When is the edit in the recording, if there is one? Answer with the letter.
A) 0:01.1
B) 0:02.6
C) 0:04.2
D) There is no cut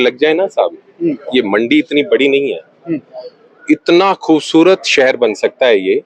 D